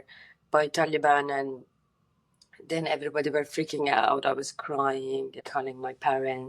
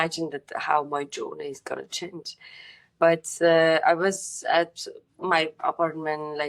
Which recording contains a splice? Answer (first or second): first